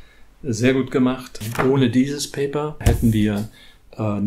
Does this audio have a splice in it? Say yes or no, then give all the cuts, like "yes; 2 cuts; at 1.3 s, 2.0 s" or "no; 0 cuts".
yes; 2 cuts; at 1.4 s, 2.8 s